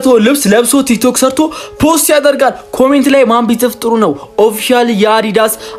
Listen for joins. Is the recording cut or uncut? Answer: uncut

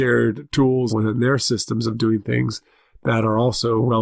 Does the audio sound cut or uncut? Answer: cut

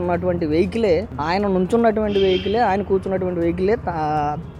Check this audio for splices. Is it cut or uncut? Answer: uncut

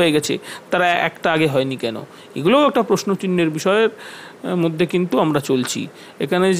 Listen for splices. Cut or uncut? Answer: uncut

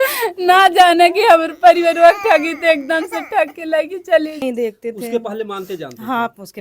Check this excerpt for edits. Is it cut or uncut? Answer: cut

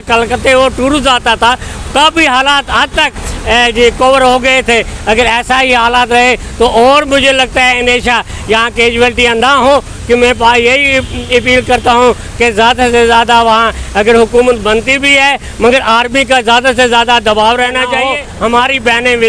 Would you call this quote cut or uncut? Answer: cut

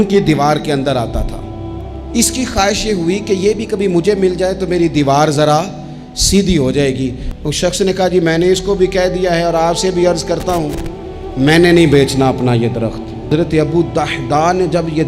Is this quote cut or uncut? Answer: cut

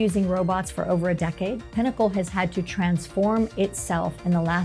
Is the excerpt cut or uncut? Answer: cut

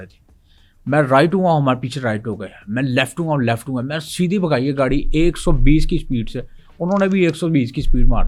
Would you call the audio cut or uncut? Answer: uncut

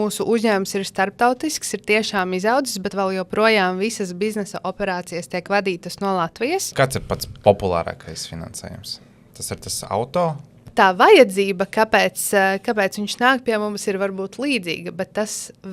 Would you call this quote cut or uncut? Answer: cut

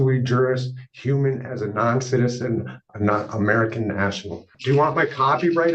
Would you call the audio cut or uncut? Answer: cut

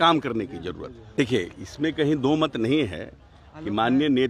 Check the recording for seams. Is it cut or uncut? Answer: cut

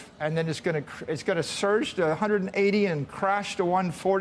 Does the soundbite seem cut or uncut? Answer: uncut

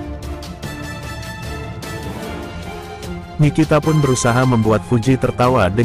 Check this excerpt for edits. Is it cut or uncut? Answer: uncut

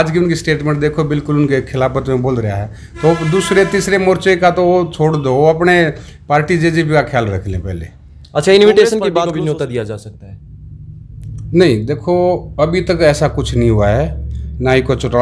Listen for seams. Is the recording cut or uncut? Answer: cut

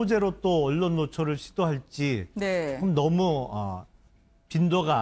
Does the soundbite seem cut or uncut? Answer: cut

